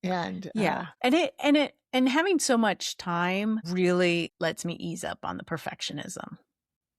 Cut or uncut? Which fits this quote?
cut